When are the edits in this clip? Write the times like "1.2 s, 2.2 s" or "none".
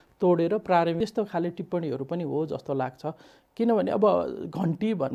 1.0 s